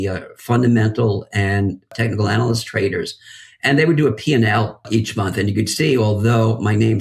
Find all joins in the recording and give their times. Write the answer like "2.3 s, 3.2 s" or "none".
1.9 s, 4.8 s